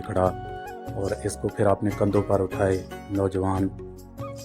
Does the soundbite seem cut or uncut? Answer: uncut